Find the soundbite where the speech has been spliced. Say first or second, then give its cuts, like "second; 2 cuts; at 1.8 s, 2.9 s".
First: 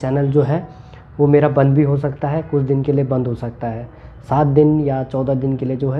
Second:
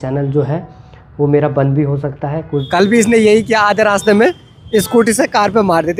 second; 1 cut; at 2.6 s